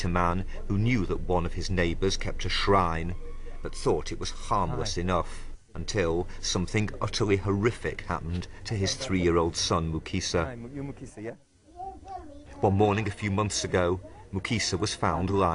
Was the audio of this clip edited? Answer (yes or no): no